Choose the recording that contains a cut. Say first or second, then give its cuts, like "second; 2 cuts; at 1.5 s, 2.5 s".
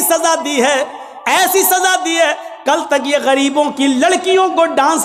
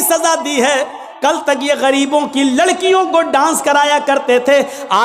second; 1 cut; at 1.0 s